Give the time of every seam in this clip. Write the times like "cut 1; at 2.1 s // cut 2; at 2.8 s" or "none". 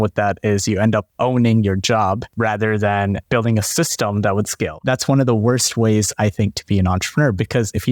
cut 1; at 1.1 s // cut 2; at 2.3 s // cut 3; at 3.2 s // cut 4; at 4.8 s

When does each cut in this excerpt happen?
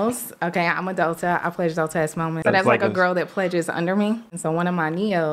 cut 1; at 2.4 s // cut 2; at 4.3 s

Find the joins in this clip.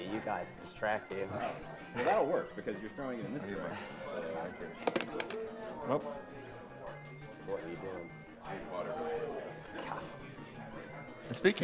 cut 1; at 7.7 s

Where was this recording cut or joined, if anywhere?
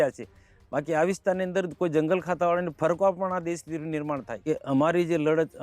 cut 1; at 4.3 s

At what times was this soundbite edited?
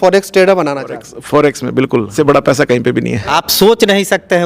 cut 1; at 2.1 s // cut 2; at 3.3 s

